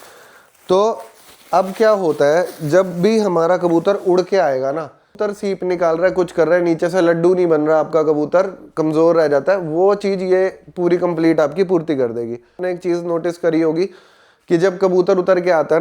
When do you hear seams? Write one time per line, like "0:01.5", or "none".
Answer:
0:05.2
0:12.6